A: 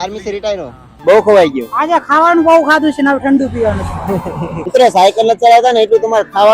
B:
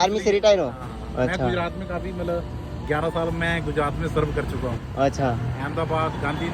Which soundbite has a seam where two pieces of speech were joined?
A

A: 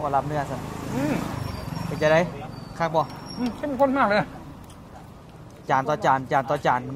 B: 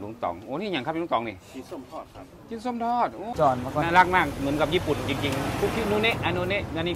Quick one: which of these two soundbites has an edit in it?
B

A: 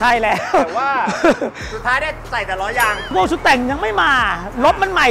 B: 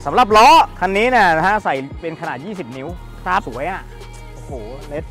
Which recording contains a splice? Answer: A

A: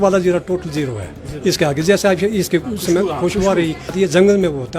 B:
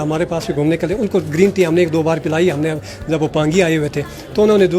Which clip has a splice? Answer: A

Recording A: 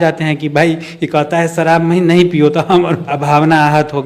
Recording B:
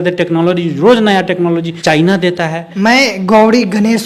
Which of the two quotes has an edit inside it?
B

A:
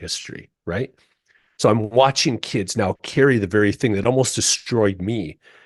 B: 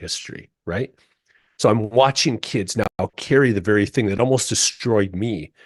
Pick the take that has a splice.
A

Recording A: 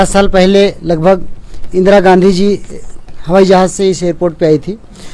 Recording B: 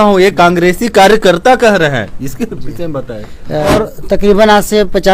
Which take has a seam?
B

